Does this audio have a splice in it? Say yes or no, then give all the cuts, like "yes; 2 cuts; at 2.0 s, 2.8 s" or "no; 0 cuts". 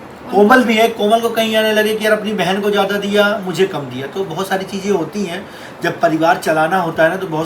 no; 0 cuts